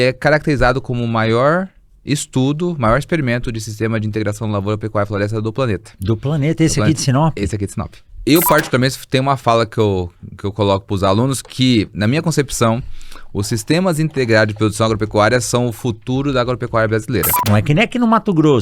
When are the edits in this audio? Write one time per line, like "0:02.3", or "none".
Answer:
0:08.1
0:17.4